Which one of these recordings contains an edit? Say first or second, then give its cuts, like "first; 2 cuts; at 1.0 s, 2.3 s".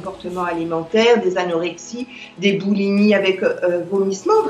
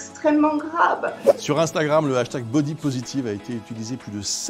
second; 1 cut; at 1.2 s